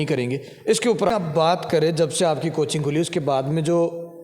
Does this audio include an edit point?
yes; 1 cut; at 1.1 s

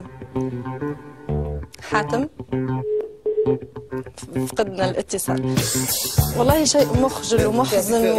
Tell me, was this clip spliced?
yes; 2 cuts; at 5.2 s, 6.3 s

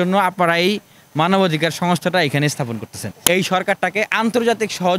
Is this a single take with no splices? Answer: no; 1 cut; at 3.1 s

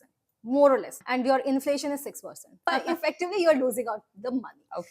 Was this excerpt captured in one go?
no; 2 cuts; at 1.0 s, 2.7 s

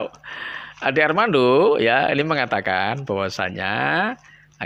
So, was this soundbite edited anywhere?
no; 0 cuts

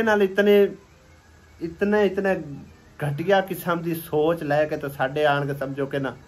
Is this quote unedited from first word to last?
yes; 0 cuts

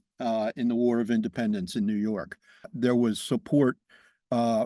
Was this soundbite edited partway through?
yes; 1 cut; at 2.7 s

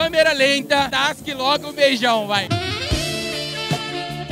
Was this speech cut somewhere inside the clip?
no; 0 cuts

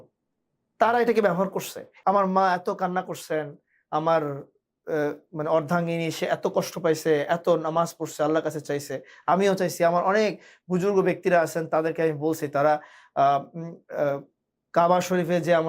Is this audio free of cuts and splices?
no; 1 cut; at 1.9 s

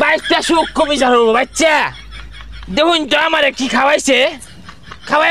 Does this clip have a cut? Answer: no; 0 cuts

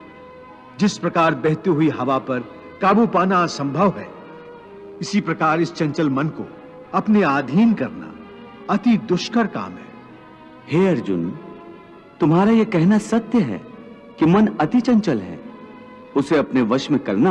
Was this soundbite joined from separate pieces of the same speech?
no; 0 cuts

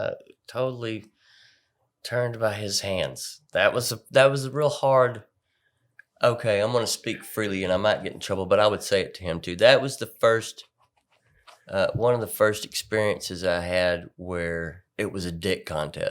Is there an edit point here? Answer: yes; 1 cut; at 14.8 s

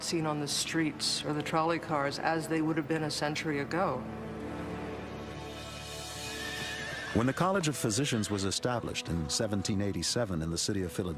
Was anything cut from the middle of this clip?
yes; 1 cut; at 5.7 s

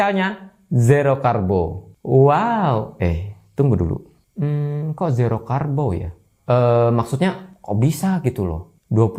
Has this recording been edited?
no; 0 cuts

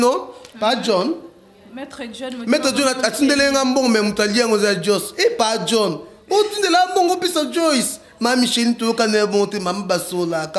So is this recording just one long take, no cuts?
yes; 0 cuts

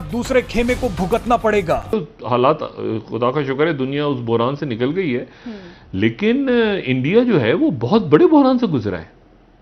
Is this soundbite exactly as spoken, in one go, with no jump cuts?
no; 1 cut; at 1.9 s

